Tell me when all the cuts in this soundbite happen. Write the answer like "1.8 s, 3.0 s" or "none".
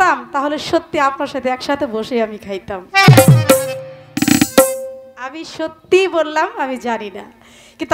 none